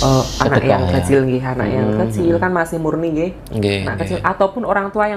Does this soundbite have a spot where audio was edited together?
no; 0 cuts

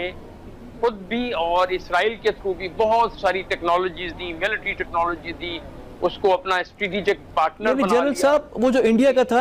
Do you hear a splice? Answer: no; 0 cuts

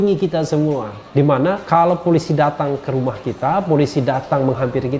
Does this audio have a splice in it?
yes; 1 cut; at 1.3 s

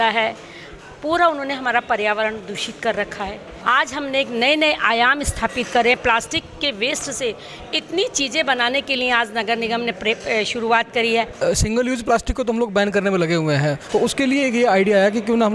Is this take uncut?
no; 3 cuts; at 3.5 s, 11.4 s, 13.8 s

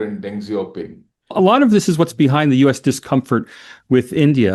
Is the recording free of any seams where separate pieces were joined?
no; 1 cut; at 1.3 s

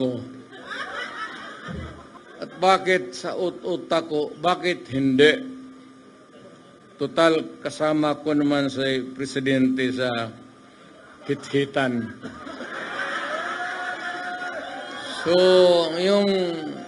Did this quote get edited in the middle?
yes; 1 cut; at 2.2 s

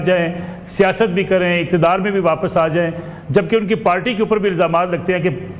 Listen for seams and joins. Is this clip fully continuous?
yes; 0 cuts

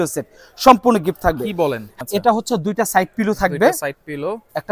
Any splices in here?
yes; 1 cut; at 1.9 s

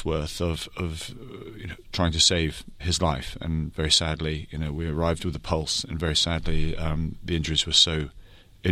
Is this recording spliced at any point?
no; 0 cuts

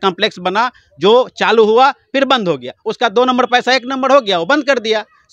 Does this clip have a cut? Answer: no; 0 cuts

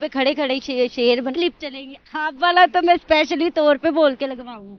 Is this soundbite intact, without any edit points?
no; 1 cut; at 1.3 s

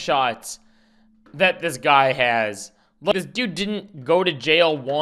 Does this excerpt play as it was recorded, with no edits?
yes; 0 cuts

